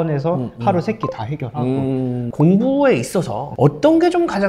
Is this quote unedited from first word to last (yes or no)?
no